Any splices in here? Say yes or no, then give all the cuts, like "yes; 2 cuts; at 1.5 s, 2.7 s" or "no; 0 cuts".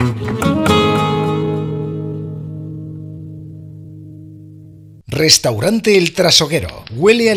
no; 0 cuts